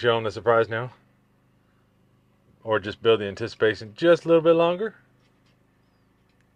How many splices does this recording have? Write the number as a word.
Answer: zero